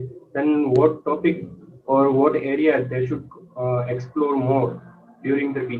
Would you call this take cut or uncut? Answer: uncut